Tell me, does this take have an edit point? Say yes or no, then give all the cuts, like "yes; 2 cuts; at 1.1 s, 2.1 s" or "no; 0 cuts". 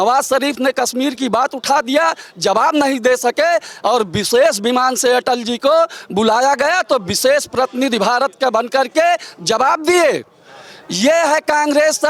no; 0 cuts